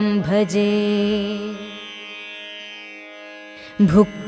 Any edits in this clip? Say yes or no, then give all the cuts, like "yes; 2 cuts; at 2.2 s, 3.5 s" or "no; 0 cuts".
yes; 1 cut; at 1.4 s